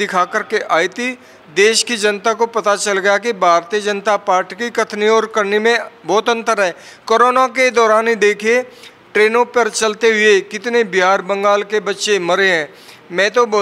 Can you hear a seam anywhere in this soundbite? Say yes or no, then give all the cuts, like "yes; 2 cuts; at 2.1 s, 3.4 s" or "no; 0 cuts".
no; 0 cuts